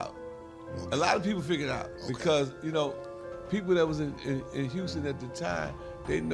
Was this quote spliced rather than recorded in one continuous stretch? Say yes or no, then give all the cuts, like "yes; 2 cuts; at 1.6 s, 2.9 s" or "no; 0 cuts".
no; 0 cuts